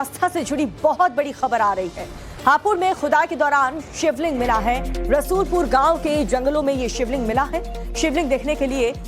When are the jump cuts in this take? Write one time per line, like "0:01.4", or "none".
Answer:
0:02.5